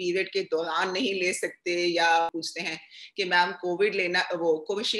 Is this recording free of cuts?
no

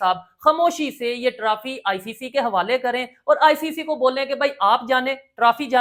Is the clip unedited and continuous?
yes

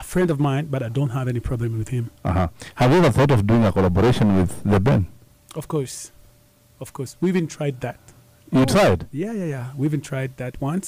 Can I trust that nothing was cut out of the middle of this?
yes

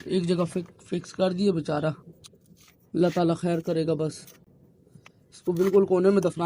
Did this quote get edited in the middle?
no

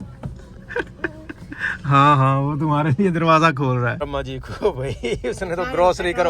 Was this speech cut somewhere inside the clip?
yes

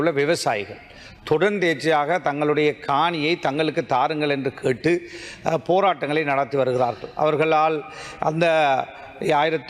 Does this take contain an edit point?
no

